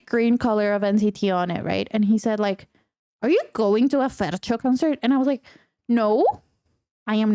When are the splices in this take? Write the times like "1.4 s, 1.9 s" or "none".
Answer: 4.6 s